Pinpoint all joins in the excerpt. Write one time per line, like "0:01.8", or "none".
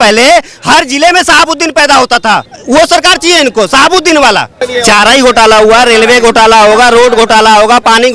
0:02.5
0:04.6